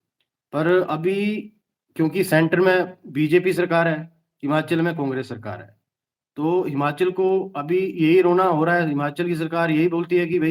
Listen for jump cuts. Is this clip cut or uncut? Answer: uncut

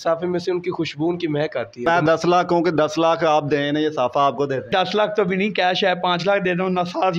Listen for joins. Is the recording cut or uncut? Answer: cut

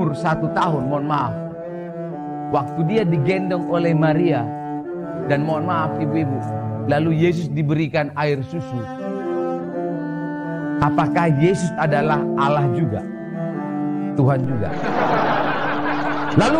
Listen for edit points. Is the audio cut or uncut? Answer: uncut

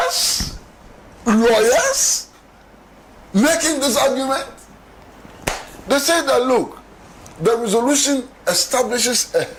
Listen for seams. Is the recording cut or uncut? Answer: uncut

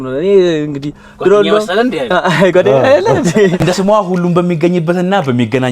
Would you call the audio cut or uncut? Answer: cut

